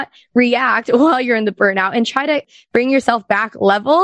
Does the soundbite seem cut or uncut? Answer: cut